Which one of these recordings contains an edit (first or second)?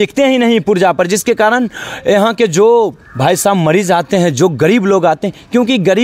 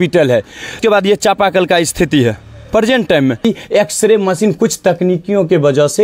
second